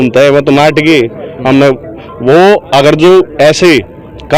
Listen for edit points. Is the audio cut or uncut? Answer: uncut